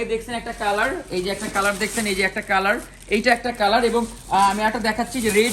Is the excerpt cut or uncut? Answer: uncut